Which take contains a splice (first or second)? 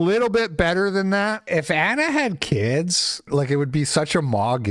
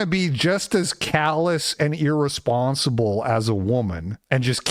first